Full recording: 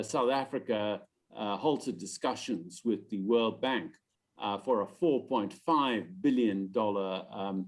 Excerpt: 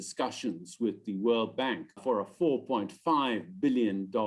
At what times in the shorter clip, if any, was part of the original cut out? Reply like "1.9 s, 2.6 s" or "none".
2.0 s